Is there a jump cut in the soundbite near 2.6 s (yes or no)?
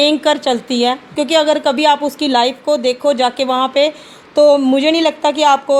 no